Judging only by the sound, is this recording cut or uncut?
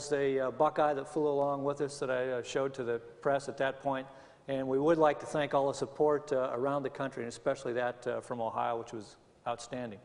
uncut